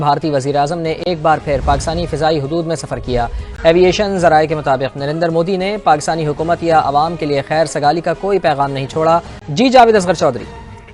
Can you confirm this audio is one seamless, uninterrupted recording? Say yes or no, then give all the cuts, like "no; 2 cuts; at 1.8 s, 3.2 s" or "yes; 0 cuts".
yes; 0 cuts